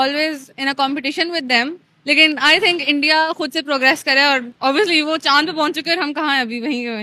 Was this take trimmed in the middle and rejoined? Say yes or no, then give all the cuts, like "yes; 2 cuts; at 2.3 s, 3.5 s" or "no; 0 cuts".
no; 0 cuts